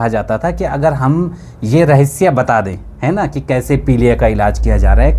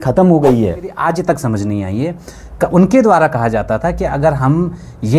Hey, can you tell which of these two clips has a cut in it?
second; 1 cut; at 1.0 s

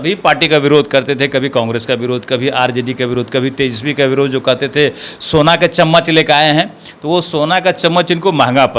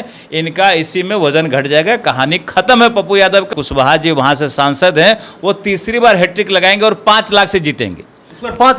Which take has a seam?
second; 1 cut; at 3.5 s

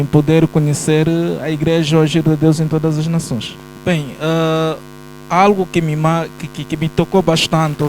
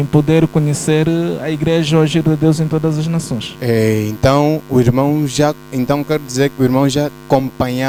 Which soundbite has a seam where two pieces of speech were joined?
first; 1 cut; at 3.4 s

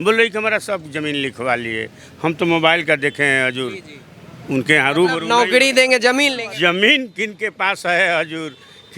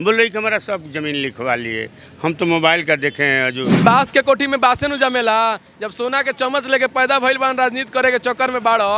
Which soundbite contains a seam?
second; 1 cut; at 3.8 s

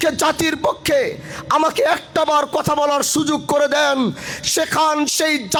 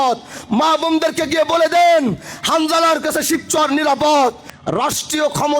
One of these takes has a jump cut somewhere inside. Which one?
second; 1 cut; at 4.5 s

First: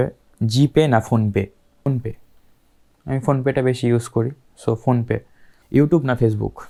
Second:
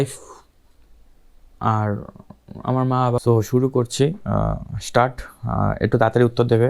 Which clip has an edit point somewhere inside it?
second; 1 cut; at 3.2 s

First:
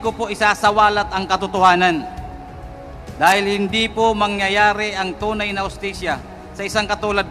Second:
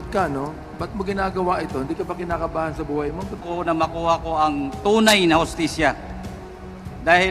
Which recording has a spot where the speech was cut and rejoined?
second; 1 cut; at 3.4 s

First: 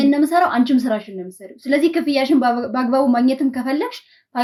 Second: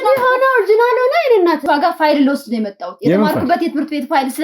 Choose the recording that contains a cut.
second; 1 cut; at 1.6 s

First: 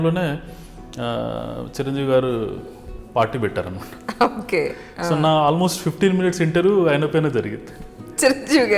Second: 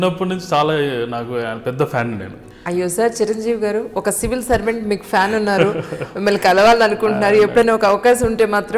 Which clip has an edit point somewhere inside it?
second; 1 cut; at 2.4 s

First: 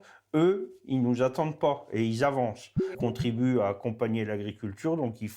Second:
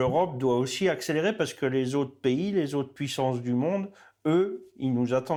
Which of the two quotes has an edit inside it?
first; 1 cut; at 2.9 s

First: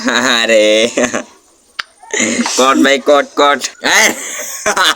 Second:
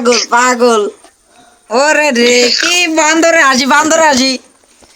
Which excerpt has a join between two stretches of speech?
first; 1 cut; at 3.7 s

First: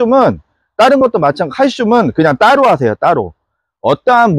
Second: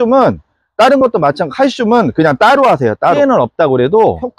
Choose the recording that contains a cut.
second; 1 cut; at 3.2 s

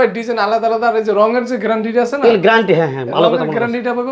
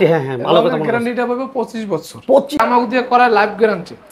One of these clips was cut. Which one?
second; 1 cut; at 2.6 s

